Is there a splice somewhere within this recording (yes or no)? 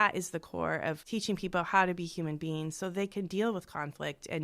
yes